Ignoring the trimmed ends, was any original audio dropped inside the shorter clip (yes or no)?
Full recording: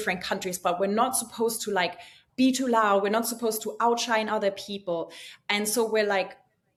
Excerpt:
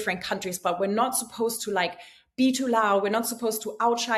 no